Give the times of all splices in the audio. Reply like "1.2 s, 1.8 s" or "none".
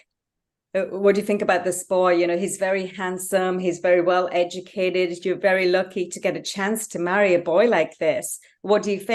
none